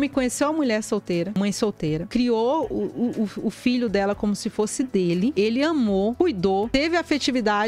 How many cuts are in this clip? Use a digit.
1